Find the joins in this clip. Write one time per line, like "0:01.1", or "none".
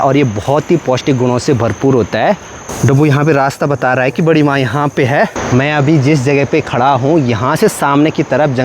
0:02.5
0:05.4